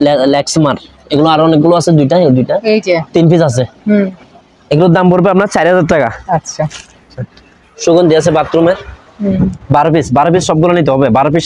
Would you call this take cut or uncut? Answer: uncut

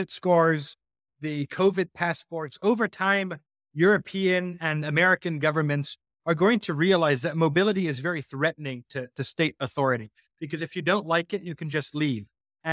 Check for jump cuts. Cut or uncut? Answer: uncut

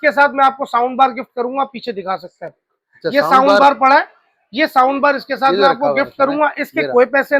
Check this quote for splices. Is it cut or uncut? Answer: uncut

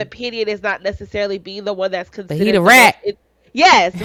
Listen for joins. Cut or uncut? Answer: uncut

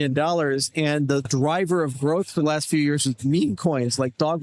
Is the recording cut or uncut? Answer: cut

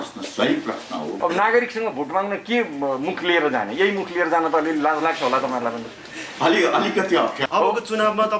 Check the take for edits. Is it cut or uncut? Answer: cut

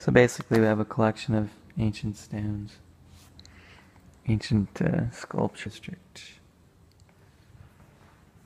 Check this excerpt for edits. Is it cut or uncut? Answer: uncut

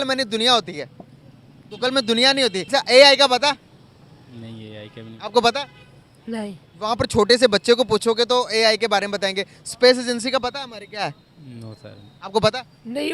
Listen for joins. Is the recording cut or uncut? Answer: cut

